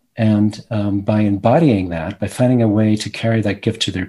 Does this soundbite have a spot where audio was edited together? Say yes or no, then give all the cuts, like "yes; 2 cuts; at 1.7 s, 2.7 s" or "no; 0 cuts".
no; 0 cuts